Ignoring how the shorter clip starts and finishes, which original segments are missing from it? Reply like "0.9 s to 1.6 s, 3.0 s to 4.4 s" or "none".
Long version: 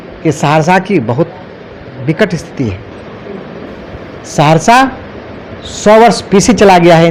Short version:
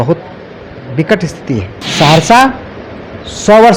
2.9 s to 4.2 s